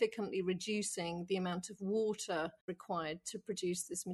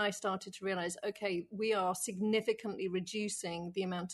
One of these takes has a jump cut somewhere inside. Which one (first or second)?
first